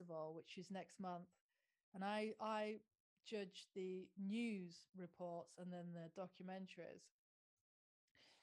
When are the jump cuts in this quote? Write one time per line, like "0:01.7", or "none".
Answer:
none

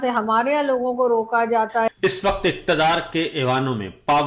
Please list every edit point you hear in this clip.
0:01.9

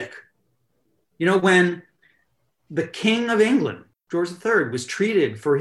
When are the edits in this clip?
0:03.8

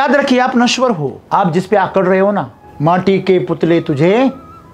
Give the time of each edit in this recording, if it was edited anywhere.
0:01.1
0:02.6

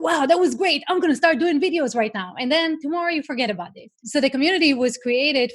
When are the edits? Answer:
0:04.0

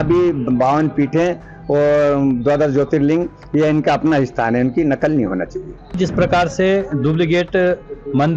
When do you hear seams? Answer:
0:05.9

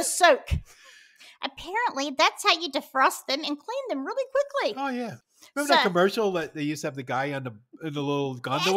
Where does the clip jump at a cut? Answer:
0:05.2

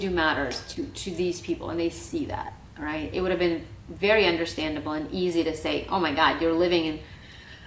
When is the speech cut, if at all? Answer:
none

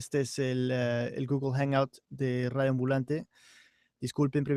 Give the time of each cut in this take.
none

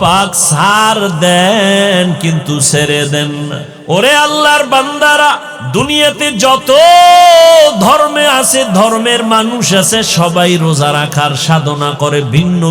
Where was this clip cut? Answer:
0:03.7
0:05.5

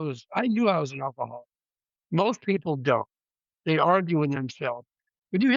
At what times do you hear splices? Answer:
none

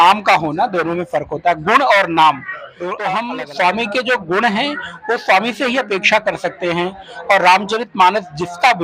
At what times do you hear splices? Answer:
0:03.2

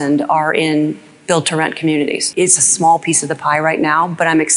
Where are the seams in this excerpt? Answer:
0:02.2

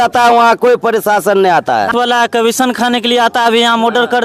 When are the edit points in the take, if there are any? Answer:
0:01.9

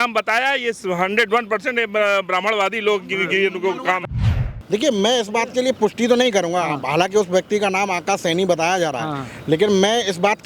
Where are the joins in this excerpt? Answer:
0:04.0

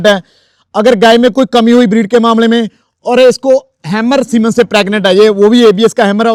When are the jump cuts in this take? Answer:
none

